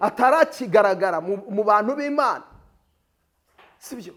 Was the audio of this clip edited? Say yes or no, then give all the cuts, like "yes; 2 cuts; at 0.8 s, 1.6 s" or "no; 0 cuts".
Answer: no; 0 cuts